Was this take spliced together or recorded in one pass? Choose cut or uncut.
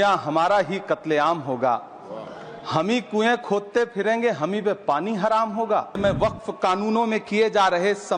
cut